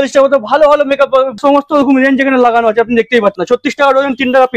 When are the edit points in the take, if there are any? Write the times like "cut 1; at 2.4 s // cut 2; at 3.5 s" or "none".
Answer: cut 1; at 1.4 s // cut 2; at 3.4 s